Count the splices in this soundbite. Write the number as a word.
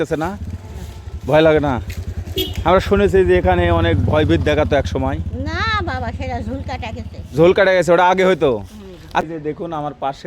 one